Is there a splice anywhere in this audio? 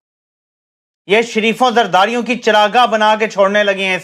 no; 0 cuts

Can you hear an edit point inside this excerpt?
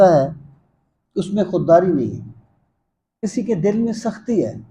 yes; 1 cut; at 3.2 s

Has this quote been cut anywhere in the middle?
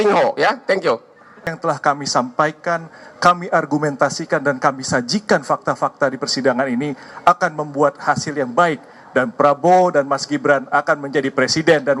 yes; 1 cut; at 1.6 s

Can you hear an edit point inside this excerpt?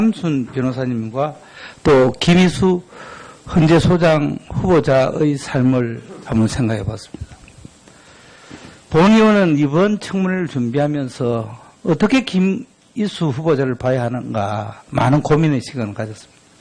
no; 0 cuts

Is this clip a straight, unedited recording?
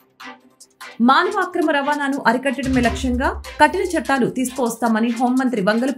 yes; 0 cuts

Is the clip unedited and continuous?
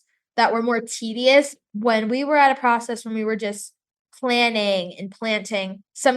no; 1 cut; at 1.5 s

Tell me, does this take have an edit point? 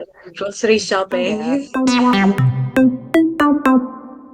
yes; 1 cut; at 1.7 s

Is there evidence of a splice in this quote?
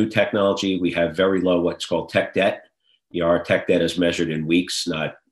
no; 0 cuts

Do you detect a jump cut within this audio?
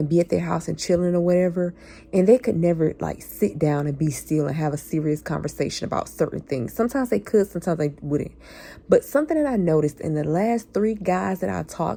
no; 0 cuts

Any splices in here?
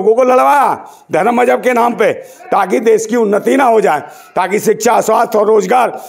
no; 0 cuts

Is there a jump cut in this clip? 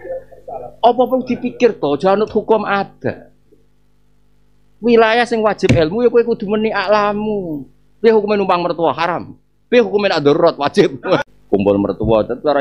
yes; 1 cut; at 11.3 s

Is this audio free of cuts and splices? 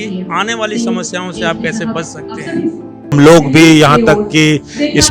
no; 1 cut; at 3.1 s

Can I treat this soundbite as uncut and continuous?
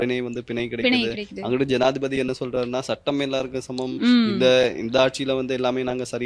yes; 0 cuts

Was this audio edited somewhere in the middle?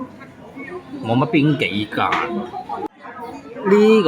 yes; 1 cut; at 2.9 s

